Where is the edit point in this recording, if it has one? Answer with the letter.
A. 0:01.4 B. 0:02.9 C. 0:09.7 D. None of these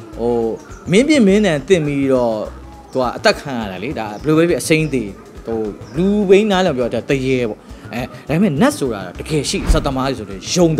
C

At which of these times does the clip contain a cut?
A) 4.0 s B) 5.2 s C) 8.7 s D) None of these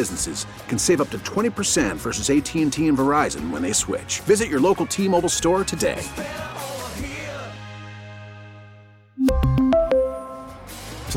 D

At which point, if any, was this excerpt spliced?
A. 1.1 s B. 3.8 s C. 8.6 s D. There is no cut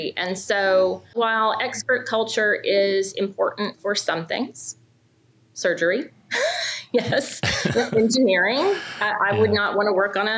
A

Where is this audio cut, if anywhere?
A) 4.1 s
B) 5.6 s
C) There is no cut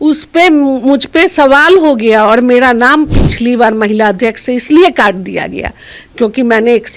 C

